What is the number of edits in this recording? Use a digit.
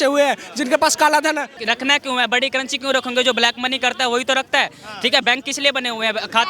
1